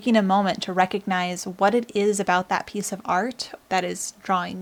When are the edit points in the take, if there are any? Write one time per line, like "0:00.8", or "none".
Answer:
none